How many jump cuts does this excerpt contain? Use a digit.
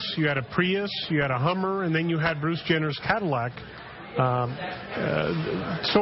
0